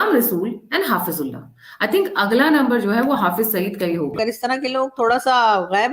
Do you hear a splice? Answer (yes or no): yes